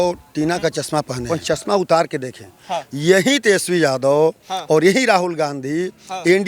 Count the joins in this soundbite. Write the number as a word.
one